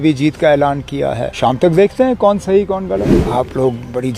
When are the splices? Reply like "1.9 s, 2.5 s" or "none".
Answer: 1.6 s, 2.9 s